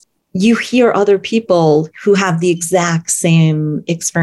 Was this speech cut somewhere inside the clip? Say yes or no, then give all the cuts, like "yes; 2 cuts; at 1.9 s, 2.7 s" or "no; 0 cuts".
no; 0 cuts